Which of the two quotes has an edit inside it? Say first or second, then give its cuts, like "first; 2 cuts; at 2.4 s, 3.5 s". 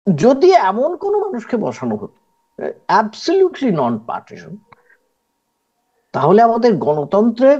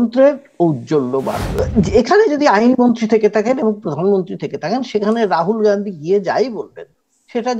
second; 1 cut; at 1.5 s